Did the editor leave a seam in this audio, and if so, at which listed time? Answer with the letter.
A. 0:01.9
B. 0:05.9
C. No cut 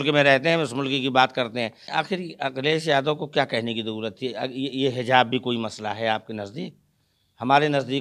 A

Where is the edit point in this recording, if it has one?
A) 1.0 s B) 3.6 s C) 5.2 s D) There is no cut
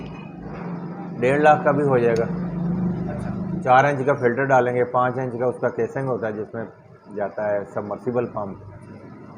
B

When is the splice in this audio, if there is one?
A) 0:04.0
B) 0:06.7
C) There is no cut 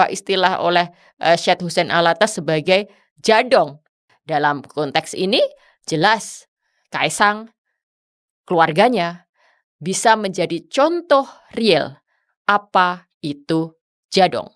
A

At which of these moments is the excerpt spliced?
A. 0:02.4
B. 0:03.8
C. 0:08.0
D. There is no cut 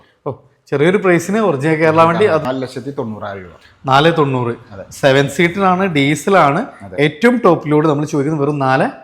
A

